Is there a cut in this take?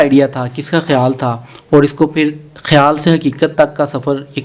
no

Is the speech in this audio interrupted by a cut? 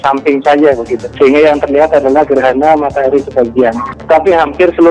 yes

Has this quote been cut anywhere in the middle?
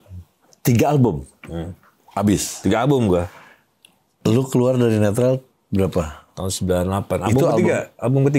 no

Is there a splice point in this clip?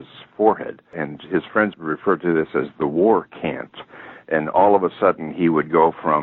yes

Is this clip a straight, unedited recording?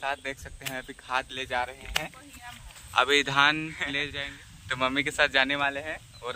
no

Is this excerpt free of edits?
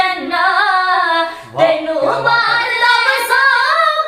no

